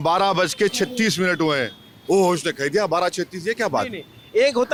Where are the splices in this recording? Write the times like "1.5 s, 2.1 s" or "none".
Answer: none